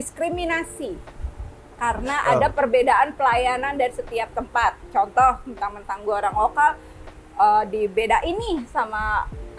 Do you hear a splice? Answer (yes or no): no